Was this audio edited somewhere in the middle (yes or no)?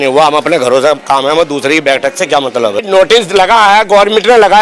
yes